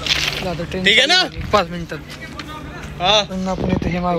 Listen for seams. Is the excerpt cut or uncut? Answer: cut